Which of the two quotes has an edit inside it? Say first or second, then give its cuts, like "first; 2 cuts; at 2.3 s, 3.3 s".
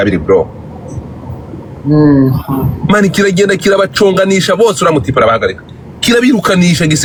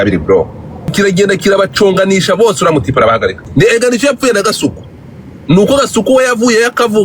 second; 2 cuts; at 0.9 s, 3.4 s